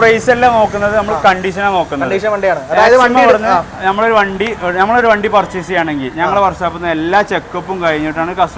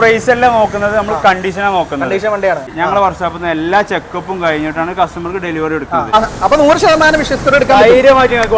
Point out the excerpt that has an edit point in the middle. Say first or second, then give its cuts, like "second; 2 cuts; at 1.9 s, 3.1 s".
second; 2 cuts; at 2.7 s, 6.1 s